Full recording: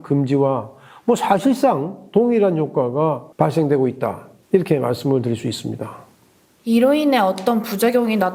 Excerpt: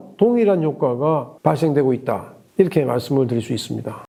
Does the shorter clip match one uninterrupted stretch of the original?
yes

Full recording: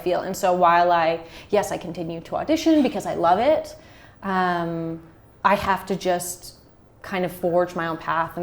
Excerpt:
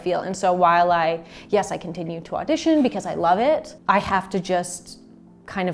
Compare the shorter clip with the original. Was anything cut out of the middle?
yes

